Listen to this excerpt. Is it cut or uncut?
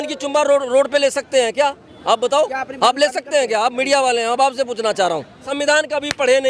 cut